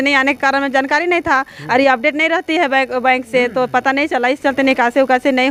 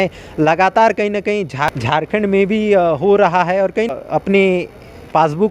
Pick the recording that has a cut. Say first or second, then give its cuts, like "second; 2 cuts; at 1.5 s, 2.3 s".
second; 2 cuts; at 1.7 s, 3.9 s